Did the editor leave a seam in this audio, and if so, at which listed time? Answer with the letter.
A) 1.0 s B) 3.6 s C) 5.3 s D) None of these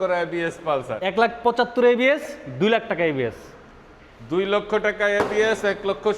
A